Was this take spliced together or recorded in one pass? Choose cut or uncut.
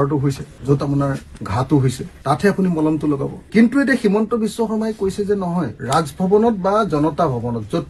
uncut